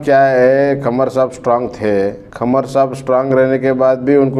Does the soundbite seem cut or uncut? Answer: cut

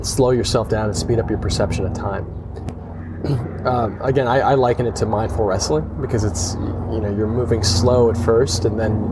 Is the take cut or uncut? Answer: cut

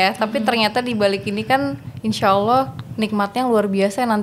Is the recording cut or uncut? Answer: uncut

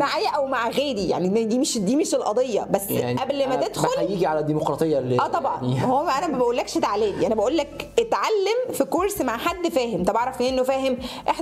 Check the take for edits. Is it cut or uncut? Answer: uncut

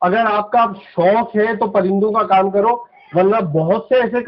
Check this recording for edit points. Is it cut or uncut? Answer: uncut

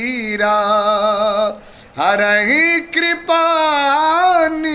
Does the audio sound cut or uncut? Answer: uncut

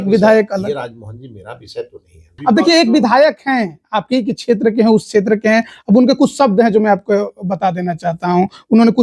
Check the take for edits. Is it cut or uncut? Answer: cut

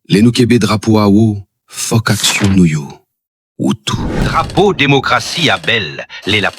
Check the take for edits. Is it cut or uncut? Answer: cut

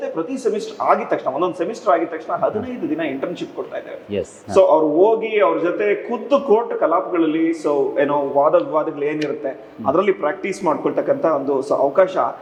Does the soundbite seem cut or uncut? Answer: uncut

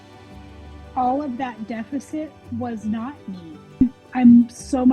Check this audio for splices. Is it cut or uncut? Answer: cut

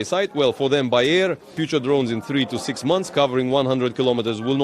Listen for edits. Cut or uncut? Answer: cut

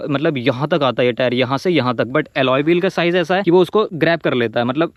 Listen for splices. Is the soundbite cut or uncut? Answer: uncut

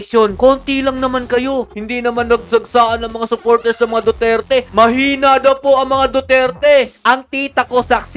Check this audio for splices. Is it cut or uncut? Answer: cut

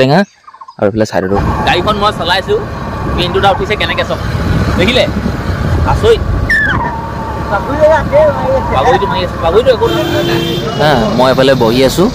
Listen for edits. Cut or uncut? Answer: cut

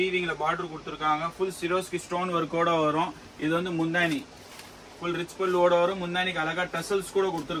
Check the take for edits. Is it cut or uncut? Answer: uncut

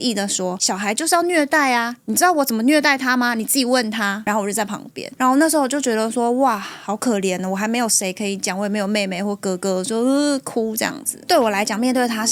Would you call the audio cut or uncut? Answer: uncut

